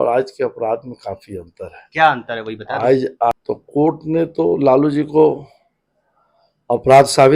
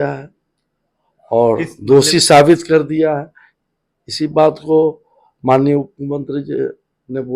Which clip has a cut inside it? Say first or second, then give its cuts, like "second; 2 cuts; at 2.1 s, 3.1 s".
first; 1 cut; at 3.3 s